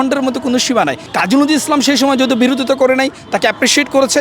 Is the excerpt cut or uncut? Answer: cut